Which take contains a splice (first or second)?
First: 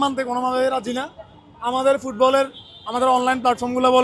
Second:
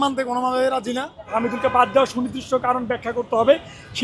second